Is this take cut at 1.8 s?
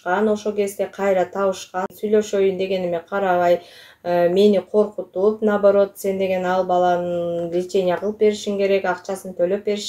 yes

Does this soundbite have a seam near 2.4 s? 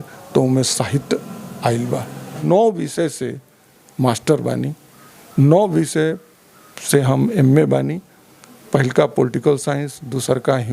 yes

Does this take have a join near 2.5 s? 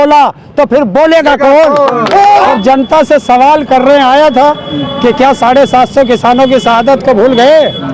yes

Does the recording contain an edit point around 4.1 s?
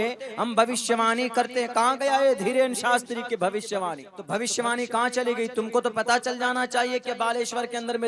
yes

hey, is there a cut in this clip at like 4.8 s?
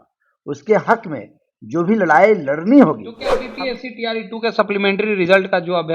no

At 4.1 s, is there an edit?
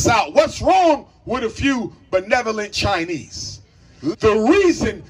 yes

